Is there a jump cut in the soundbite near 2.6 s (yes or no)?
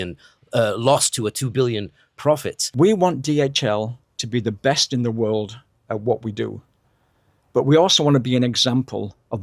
yes